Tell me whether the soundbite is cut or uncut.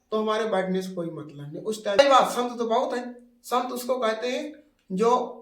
cut